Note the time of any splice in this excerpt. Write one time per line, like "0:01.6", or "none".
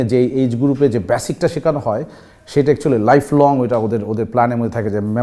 none